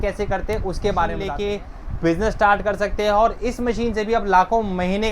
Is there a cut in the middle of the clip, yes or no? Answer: yes